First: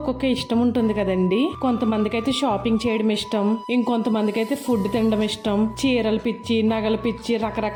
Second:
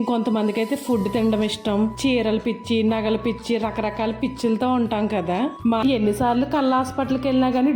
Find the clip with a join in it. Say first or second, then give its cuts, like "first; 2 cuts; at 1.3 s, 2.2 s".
second; 1 cut; at 5.8 s